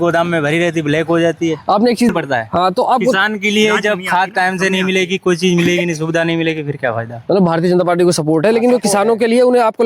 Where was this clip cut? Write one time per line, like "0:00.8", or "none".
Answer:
none